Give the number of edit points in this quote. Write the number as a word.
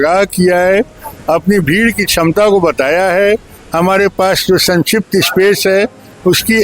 zero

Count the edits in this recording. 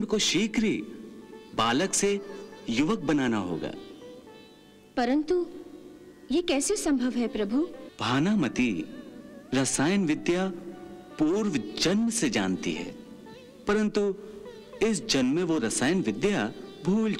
one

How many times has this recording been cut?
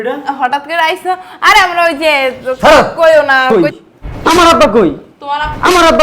one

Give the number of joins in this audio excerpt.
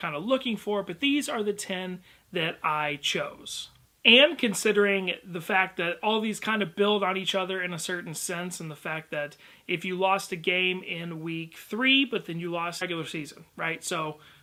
zero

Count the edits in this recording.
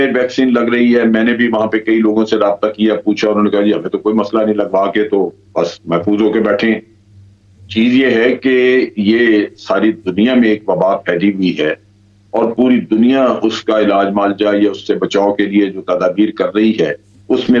zero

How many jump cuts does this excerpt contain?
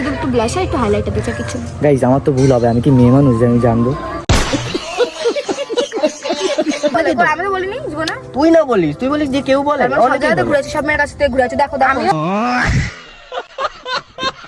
one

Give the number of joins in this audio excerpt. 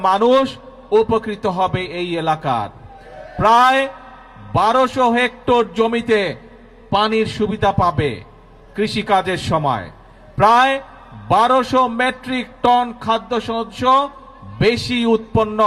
zero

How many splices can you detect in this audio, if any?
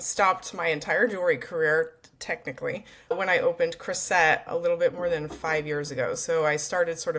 two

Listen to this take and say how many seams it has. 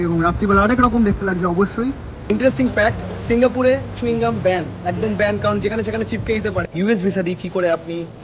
two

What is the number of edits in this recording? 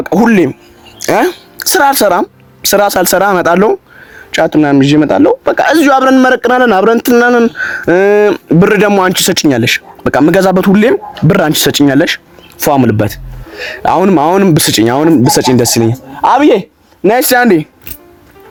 zero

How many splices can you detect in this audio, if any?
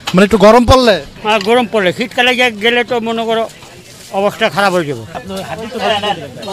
one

